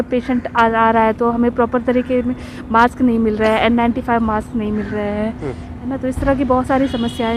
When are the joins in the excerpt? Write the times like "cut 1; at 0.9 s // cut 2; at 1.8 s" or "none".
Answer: none